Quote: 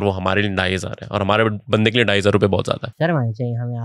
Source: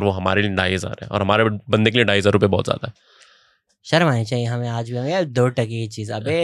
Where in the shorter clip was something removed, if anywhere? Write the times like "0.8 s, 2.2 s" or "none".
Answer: 2.9 s